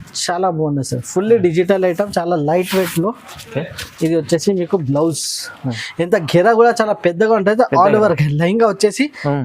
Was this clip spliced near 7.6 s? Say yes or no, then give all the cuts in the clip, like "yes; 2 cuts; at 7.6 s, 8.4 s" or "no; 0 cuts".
no; 1 cut; at 5.8 s